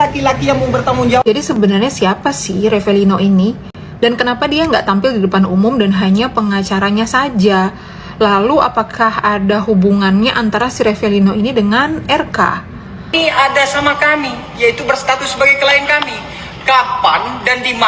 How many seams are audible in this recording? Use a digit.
1